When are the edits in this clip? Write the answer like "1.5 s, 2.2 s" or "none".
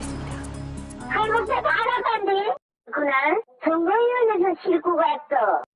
none